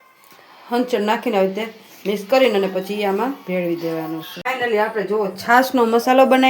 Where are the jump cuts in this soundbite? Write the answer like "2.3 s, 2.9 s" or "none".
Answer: 4.3 s